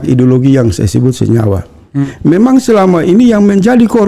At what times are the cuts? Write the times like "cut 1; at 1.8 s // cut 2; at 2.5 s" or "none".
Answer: cut 1; at 1.9 s